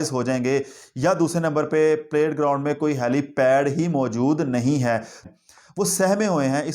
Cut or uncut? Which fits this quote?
cut